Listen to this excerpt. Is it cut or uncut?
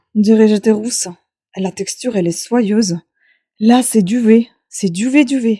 uncut